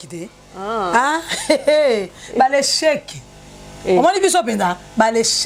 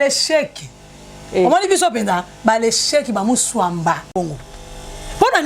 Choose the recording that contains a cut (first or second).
second